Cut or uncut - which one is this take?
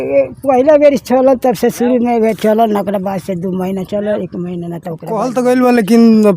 cut